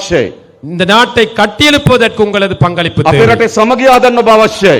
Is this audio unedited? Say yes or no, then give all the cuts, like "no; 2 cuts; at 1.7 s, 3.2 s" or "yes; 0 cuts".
yes; 0 cuts